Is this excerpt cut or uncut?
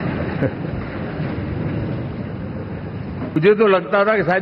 cut